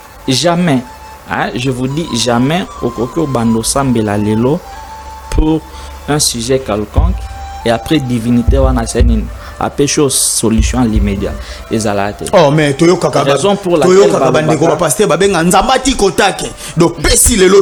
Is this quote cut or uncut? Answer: uncut